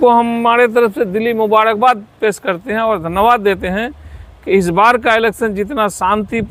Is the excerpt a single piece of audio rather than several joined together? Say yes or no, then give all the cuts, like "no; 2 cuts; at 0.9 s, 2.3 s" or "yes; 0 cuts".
yes; 0 cuts